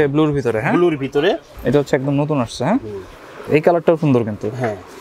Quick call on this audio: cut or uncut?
cut